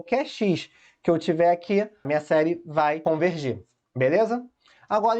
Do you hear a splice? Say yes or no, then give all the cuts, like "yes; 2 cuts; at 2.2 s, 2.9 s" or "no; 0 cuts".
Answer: yes; 2 cuts; at 2.0 s, 3.0 s